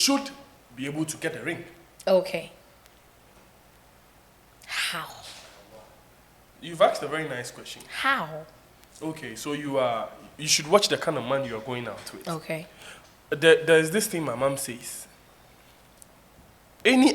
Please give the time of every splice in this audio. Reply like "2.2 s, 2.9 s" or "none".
none